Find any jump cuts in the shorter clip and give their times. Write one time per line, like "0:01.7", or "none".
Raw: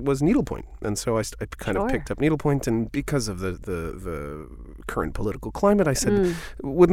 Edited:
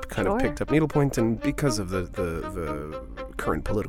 none